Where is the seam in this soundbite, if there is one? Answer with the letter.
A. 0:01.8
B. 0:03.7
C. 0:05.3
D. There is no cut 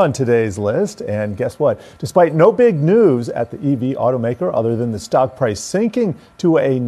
D